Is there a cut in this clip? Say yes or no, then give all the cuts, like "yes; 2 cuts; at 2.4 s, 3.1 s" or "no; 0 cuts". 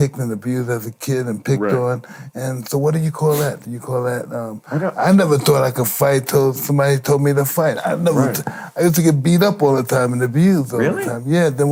no; 0 cuts